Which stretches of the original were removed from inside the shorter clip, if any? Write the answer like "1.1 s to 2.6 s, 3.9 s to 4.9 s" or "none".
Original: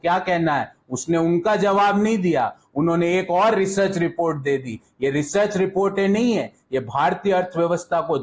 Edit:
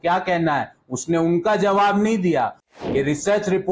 2.6 s to 4.7 s